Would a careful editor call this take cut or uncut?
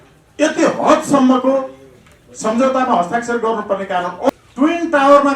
cut